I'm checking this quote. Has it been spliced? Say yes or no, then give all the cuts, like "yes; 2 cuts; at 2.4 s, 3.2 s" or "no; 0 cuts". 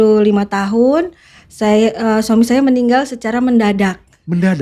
no; 0 cuts